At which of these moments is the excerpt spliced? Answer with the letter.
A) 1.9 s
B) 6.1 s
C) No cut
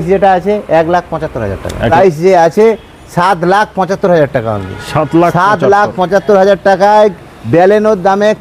A